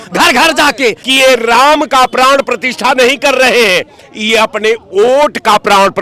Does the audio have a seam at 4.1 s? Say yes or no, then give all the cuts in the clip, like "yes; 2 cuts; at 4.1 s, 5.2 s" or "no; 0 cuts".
no; 1 cut; at 1.0 s